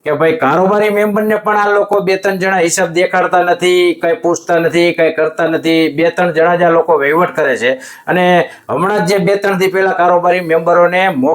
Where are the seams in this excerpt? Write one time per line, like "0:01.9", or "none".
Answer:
none